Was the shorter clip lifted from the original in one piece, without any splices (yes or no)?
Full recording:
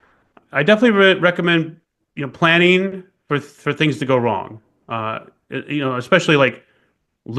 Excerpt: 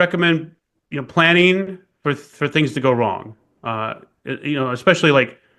yes